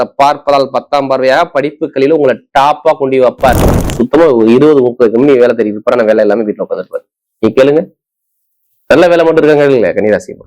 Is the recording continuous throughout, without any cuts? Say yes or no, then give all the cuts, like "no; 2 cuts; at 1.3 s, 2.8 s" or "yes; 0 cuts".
no; 1 cut; at 3.9 s